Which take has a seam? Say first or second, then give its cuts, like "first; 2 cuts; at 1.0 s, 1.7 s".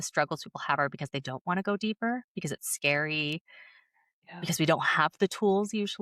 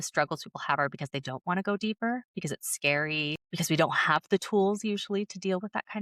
second; 1 cut; at 3.5 s